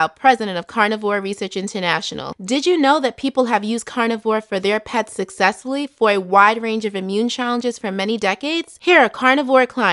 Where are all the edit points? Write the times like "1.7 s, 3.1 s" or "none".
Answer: none